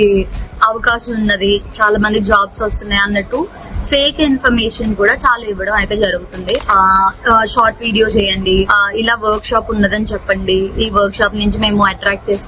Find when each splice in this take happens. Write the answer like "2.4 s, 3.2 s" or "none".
6.6 s